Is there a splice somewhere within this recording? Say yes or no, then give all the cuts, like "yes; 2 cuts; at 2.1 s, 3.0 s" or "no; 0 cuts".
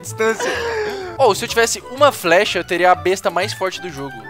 yes; 1 cut; at 1.1 s